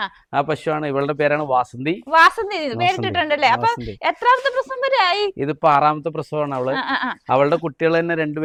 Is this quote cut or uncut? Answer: uncut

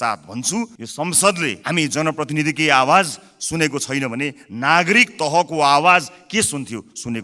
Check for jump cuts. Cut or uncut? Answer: uncut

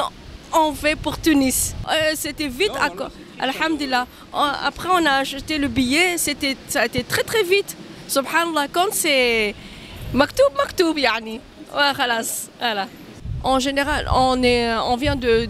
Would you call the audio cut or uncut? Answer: cut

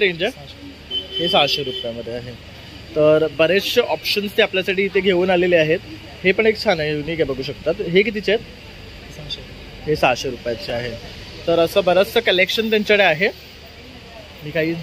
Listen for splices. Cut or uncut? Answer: uncut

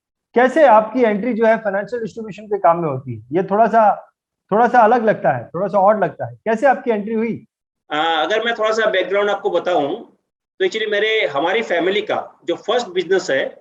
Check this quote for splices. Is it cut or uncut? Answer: uncut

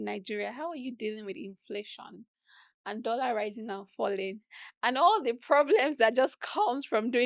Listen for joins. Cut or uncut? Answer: uncut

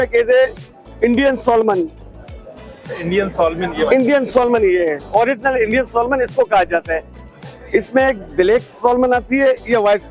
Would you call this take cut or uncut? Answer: uncut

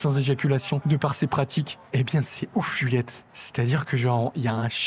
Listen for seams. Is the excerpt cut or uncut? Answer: cut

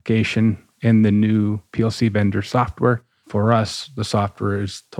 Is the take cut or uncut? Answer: cut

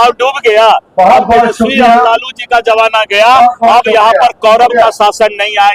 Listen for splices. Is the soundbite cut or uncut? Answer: uncut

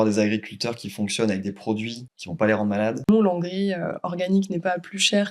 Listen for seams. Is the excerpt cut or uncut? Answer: cut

